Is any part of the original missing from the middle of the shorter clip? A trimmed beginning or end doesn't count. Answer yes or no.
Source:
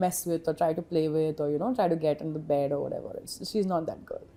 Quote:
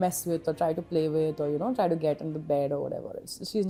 no